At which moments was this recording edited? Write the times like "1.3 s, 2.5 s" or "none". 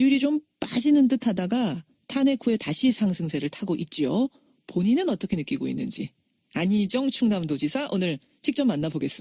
none